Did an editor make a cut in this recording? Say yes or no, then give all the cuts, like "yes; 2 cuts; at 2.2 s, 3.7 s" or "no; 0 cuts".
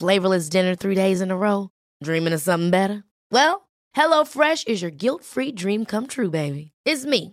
no; 0 cuts